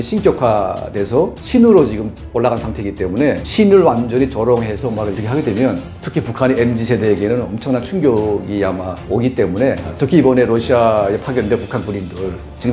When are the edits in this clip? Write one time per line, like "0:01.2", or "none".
0:09.9